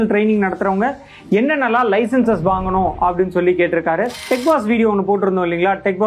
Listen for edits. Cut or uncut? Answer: cut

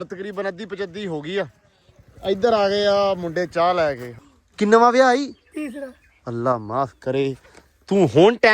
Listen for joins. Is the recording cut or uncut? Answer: cut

